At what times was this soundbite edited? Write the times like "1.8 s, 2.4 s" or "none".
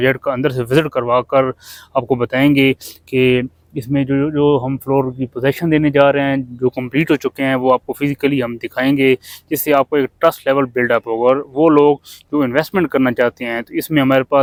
none